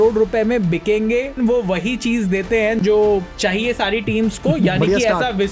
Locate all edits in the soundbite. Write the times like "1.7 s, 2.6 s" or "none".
1.4 s, 3.3 s